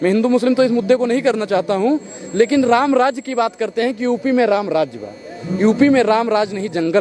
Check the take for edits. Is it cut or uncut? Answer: uncut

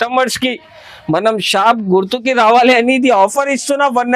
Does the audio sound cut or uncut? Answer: uncut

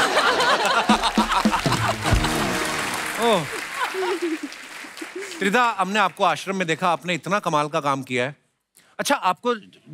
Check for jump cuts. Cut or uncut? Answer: uncut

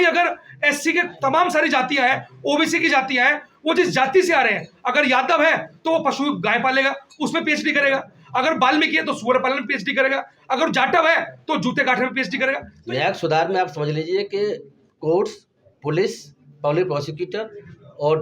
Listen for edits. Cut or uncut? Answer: cut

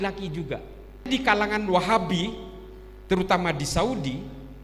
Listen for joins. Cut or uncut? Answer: cut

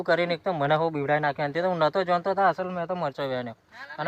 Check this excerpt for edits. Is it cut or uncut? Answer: uncut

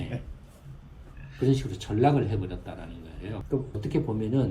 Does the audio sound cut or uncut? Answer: cut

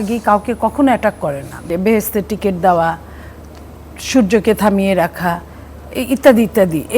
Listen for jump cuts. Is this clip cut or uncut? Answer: cut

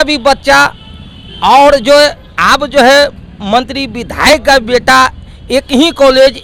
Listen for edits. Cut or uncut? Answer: uncut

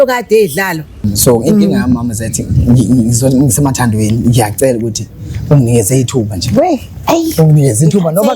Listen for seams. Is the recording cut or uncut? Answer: cut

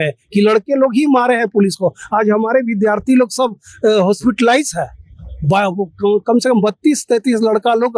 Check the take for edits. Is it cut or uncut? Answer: uncut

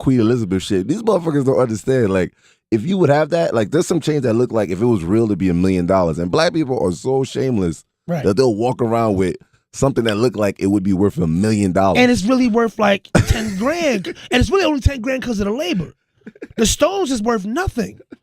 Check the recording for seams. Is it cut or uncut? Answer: cut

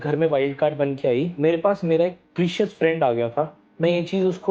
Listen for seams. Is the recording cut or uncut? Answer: cut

